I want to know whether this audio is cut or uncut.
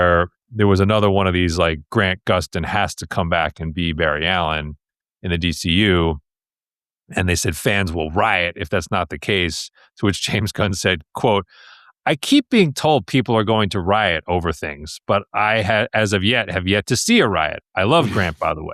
uncut